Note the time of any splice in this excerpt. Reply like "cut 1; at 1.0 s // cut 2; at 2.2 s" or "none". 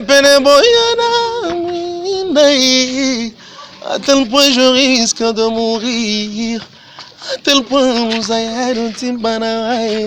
none